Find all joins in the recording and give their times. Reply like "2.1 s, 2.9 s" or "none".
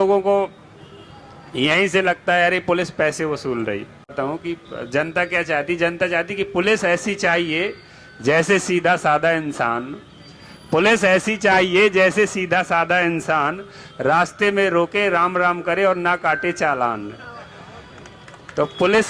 4.1 s